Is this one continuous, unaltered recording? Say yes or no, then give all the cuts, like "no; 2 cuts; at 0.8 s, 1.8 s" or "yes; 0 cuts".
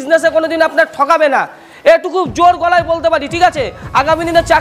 yes; 0 cuts